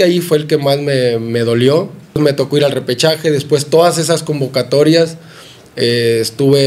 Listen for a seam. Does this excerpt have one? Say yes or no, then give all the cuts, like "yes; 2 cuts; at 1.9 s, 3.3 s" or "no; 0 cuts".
yes; 1 cut; at 2.2 s